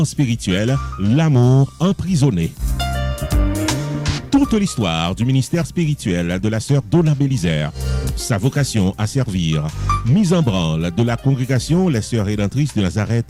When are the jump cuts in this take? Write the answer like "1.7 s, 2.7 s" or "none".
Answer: none